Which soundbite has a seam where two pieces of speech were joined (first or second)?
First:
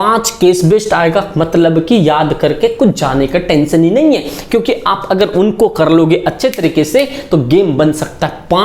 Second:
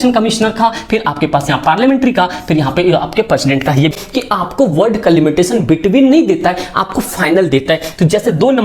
second